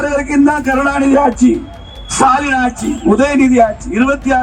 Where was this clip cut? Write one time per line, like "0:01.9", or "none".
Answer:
none